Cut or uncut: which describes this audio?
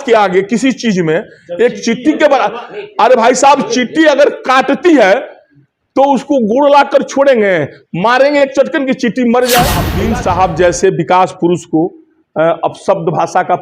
cut